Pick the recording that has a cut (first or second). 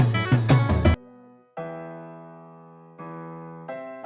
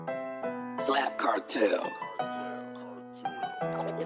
first